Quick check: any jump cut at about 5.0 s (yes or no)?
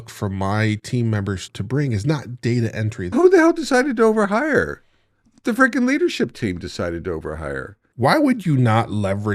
no